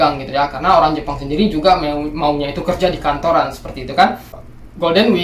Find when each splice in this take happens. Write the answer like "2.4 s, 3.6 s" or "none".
4.3 s